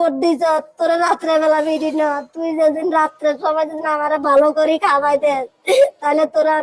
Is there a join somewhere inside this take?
no; 0 cuts

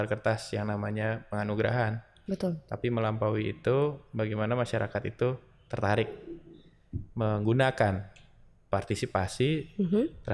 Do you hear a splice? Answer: no; 0 cuts

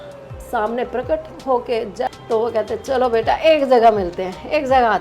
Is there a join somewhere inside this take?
yes; 1 cut; at 2.1 s

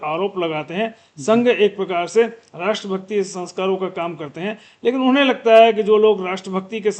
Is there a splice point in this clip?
no; 0 cuts

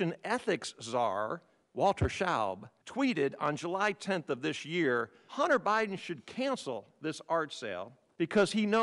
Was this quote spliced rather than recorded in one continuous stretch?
no; 0 cuts

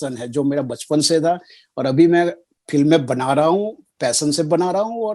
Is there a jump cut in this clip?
no; 0 cuts

